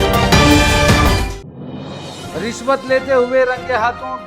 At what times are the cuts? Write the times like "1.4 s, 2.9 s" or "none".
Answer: 1.2 s, 2.3 s